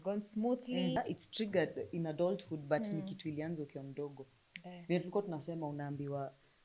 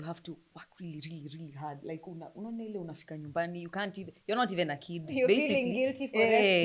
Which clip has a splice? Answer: first; 1 cut; at 1.0 s

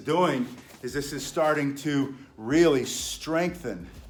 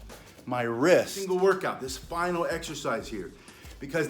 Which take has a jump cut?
second; 1 cut; at 1.2 s

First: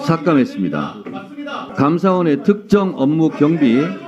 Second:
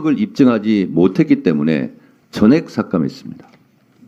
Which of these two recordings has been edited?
first; 1 cut; at 1.6 s

